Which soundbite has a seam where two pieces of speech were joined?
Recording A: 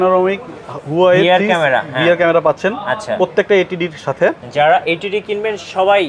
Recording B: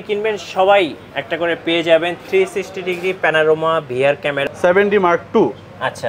B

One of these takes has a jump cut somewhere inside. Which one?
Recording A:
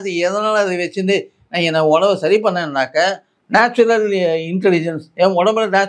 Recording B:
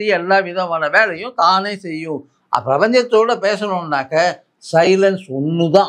B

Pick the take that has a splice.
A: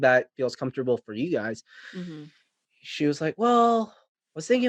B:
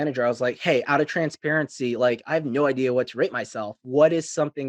B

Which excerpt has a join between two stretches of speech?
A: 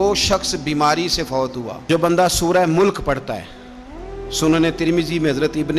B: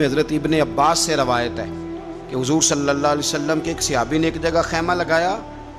A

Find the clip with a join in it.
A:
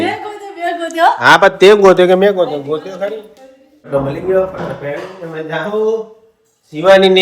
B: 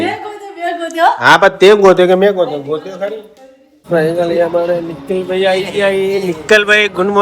B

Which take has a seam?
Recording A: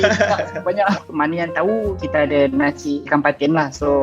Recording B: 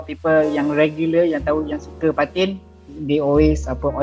A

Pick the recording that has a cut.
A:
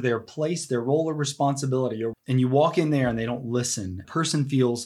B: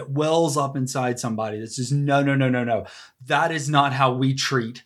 A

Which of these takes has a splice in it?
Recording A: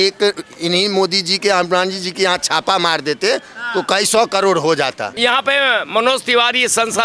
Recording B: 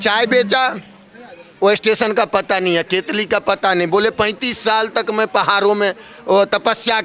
A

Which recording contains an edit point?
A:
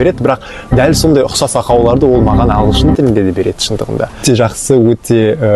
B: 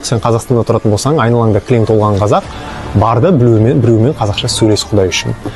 A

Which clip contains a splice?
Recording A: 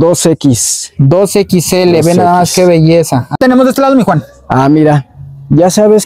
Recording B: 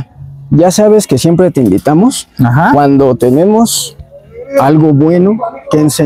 A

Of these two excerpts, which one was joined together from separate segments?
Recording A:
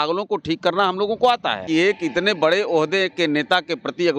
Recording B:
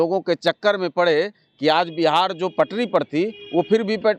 A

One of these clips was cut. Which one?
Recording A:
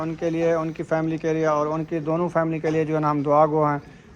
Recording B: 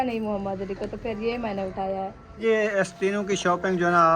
B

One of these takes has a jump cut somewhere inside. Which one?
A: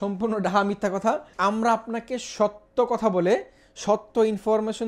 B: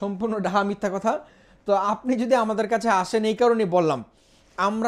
A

